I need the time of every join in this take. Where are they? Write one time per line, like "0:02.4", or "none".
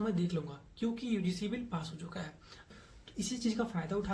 0:02.7

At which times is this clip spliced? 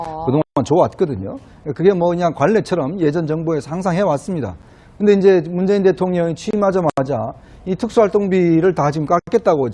0:08.5

